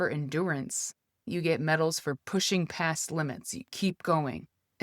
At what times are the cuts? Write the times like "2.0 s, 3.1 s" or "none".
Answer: 1.1 s